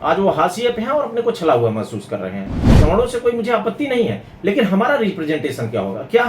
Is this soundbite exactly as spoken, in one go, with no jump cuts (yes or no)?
no